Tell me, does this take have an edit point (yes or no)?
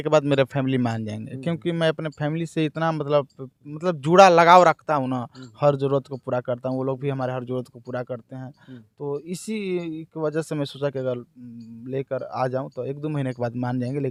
no